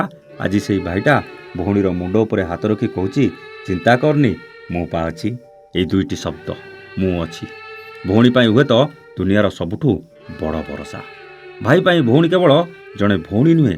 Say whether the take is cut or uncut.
uncut